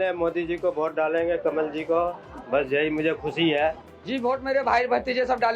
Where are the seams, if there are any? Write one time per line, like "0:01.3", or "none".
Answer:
0:03.9